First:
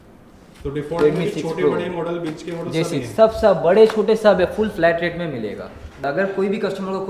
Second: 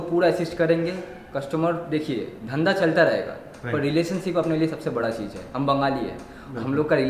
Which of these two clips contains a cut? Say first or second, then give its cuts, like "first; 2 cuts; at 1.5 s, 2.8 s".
first; 1 cut; at 6.0 s